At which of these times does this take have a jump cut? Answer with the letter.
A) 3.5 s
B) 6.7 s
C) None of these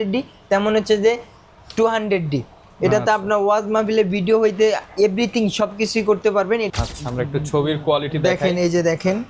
B